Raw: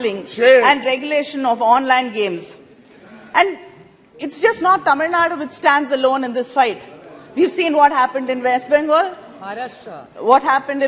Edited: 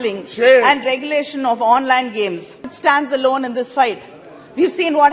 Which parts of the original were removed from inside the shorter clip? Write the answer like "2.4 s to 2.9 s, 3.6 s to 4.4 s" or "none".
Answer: 2.7 s to 5.5 s